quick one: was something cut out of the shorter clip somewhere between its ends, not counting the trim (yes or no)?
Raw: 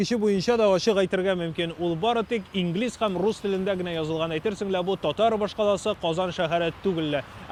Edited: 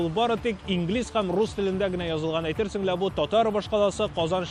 no